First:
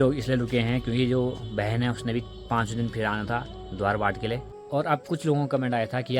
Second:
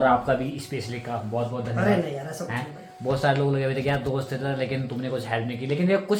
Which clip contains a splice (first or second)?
first